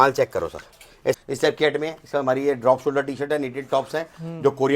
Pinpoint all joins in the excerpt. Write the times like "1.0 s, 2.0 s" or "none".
1.2 s